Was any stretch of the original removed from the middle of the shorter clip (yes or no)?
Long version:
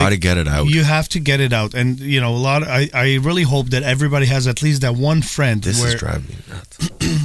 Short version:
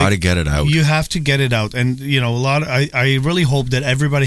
no